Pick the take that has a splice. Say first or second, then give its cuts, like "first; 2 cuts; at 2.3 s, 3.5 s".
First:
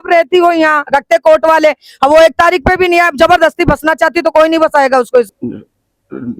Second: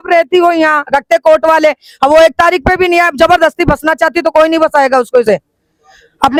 first; 1 cut; at 5.2 s